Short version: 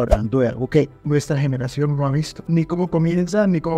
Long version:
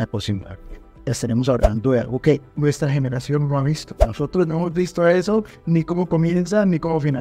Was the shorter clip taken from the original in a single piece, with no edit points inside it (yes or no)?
no